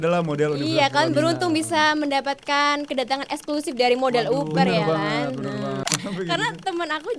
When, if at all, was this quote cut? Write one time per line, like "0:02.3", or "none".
0:05.8